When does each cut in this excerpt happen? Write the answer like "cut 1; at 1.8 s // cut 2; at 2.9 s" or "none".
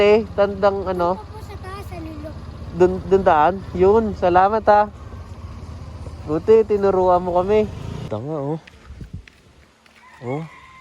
cut 1; at 8.1 s

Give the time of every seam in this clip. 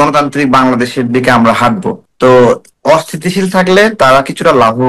cut 1; at 2.0 s // cut 2; at 2.7 s

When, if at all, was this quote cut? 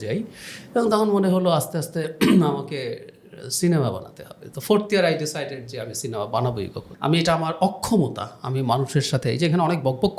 cut 1; at 6.8 s

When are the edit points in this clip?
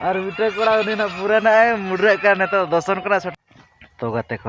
cut 1; at 3.3 s

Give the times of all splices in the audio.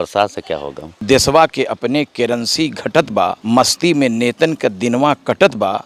cut 1; at 1.0 s // cut 2; at 3.4 s

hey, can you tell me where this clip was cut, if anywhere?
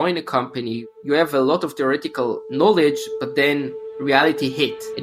cut 1; at 0.9 s

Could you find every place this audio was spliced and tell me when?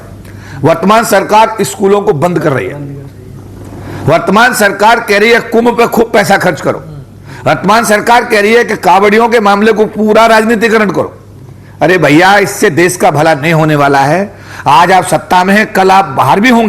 none

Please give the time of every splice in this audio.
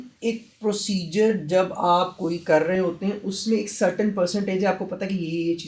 none

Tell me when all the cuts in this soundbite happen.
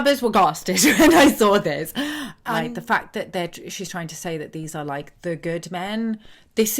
cut 1; at 2.3 s

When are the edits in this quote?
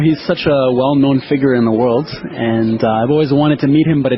none

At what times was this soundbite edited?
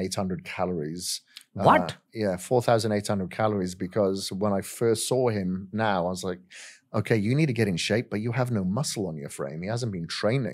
none

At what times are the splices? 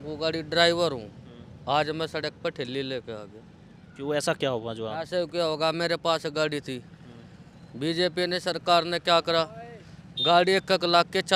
none

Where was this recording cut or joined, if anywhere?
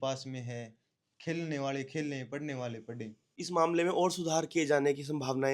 cut 1; at 3.4 s

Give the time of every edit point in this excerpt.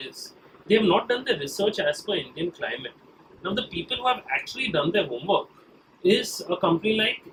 none

